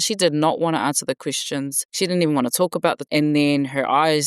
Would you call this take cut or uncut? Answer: cut